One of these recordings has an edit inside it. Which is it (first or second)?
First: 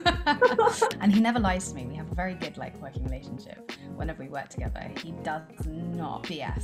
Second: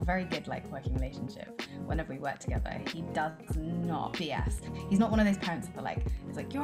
first